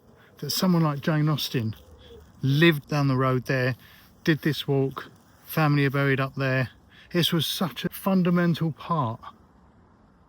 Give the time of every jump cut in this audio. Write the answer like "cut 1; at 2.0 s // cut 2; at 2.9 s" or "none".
cut 1; at 2.8 s // cut 2; at 7.9 s